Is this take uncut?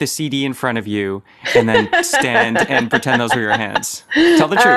yes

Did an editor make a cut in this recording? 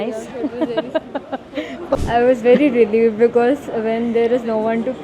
yes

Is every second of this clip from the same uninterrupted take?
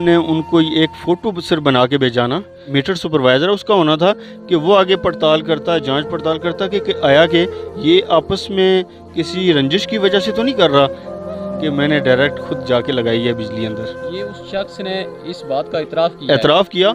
no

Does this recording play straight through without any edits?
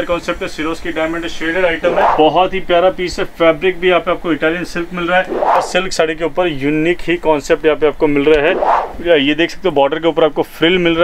no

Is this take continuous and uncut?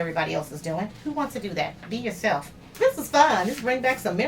no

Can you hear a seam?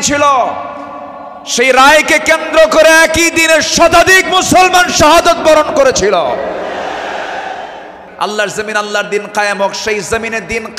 yes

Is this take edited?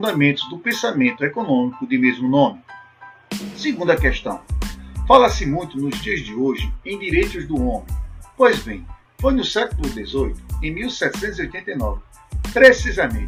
no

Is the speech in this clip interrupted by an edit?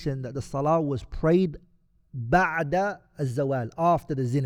no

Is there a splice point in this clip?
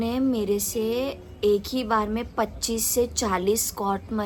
no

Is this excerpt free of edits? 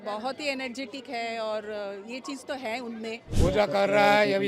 no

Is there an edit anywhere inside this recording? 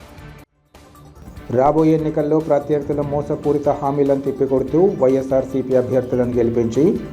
yes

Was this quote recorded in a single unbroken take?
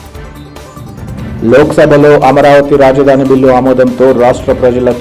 yes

